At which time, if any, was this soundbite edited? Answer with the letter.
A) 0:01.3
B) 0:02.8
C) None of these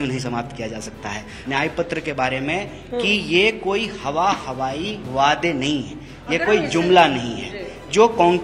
A